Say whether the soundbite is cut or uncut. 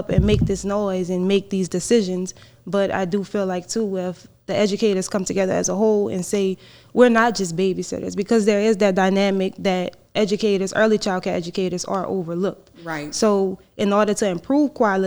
uncut